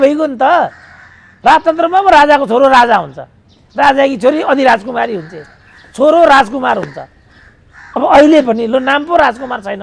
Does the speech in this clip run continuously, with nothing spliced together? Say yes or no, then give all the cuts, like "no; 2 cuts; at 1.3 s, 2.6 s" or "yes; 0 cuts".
yes; 0 cuts